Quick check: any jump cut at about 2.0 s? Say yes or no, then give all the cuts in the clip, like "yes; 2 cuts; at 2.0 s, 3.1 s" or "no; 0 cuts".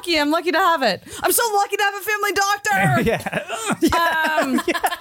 no; 0 cuts